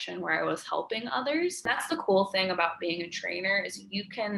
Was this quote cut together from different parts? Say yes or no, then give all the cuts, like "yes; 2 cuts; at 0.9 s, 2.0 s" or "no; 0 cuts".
yes; 1 cut; at 1.8 s